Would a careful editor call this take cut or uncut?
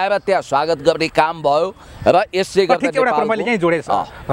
uncut